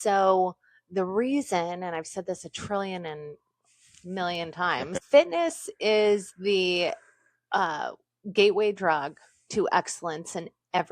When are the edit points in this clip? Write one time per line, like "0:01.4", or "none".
0:04.9